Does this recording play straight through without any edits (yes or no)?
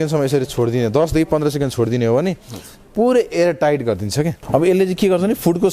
no